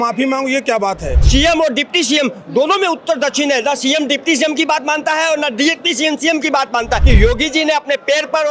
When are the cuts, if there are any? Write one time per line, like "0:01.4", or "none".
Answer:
0:01.2
0:07.0